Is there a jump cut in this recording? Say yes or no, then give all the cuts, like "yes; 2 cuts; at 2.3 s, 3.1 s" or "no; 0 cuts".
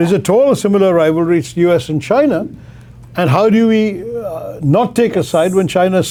no; 0 cuts